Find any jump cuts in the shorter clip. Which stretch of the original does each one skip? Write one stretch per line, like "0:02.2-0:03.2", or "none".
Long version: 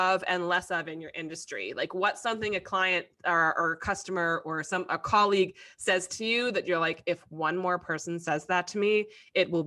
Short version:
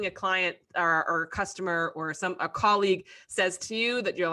none